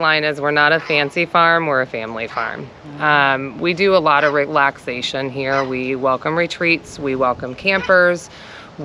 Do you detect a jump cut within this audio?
no; 0 cuts

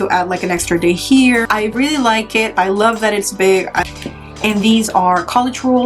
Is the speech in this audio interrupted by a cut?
yes; 2 cuts; at 1.5 s, 3.9 s

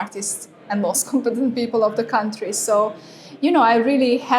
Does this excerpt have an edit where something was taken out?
no; 0 cuts

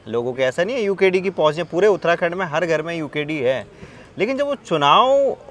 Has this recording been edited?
no; 0 cuts

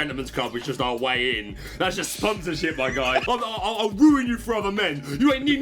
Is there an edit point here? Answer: yes; 1 cut; at 3.2 s

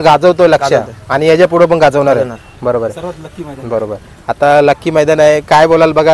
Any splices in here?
no; 0 cuts

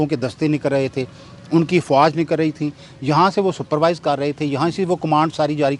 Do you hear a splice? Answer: no; 0 cuts

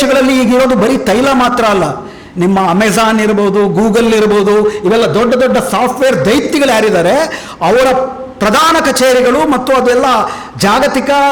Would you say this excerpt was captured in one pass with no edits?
yes; 0 cuts

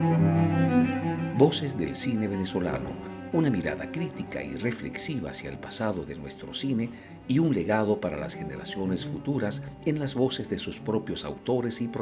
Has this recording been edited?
no; 0 cuts

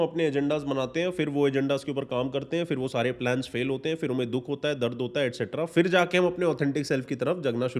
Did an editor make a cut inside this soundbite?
no; 0 cuts

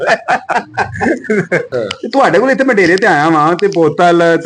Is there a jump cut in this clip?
yes; 1 cut; at 1.7 s

